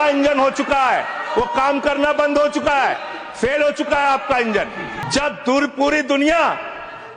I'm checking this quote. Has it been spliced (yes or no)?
yes